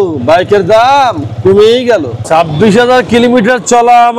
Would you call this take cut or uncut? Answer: cut